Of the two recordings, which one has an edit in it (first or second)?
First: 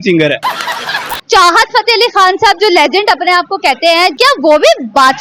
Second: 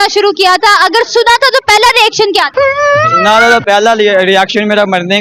first